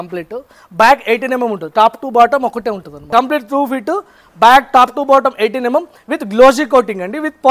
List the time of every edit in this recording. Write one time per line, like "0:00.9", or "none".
0:02.9